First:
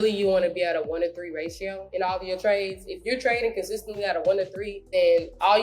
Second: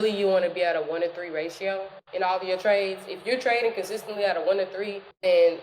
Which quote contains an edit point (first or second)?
first